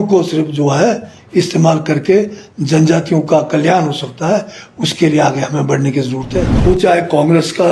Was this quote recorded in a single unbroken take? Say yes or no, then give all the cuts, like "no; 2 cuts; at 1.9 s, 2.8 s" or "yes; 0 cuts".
no; 1 cut; at 6.5 s